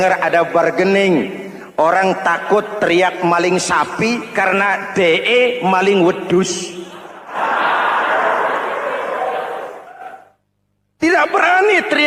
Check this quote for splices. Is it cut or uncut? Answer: uncut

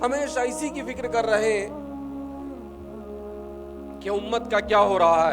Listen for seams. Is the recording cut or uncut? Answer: uncut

